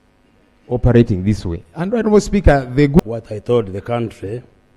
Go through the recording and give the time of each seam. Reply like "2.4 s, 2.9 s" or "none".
3.0 s